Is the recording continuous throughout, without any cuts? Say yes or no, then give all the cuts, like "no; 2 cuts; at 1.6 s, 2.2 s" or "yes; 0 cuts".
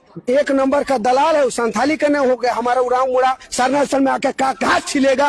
yes; 0 cuts